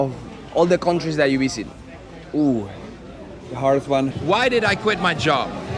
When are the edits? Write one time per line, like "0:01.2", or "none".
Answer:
0:04.2